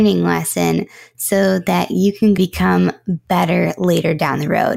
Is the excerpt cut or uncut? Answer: cut